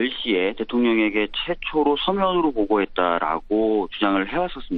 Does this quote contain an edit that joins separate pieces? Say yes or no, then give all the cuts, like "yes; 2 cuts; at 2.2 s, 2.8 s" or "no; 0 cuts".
yes; 1 cut; at 3.1 s